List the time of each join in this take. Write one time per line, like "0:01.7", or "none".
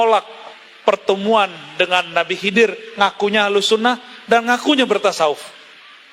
none